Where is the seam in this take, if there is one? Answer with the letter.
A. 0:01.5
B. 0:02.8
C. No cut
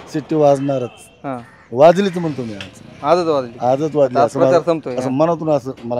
C